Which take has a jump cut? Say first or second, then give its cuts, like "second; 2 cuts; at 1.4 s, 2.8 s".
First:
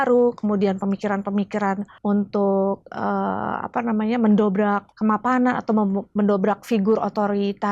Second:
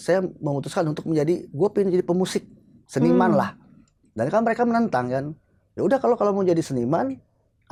first; 2 cuts; at 1.9 s, 4.9 s